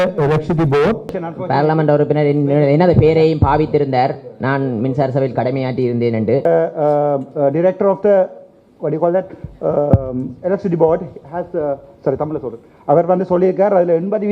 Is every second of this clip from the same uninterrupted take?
no; 2 cuts; at 1.2 s, 6.4 s

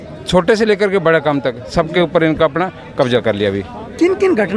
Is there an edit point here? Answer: no; 0 cuts

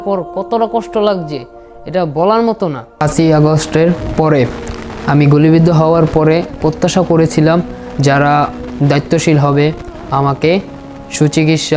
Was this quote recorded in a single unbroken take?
no; 1 cut; at 2.9 s

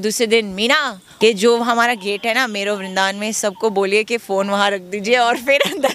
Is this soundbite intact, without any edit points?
no; 1 cut; at 1.0 s

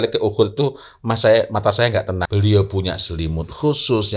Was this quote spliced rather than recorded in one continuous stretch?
yes; 1 cut; at 2.3 s

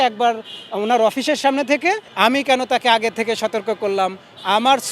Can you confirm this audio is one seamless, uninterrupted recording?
no; 1 cut; at 2.1 s

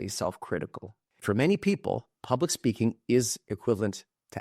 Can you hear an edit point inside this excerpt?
yes; 1 cut; at 1.0 s

